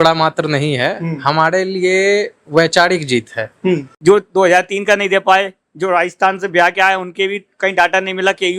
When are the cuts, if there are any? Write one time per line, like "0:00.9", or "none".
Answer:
0:03.9